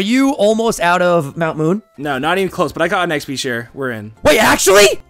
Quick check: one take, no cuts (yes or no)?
no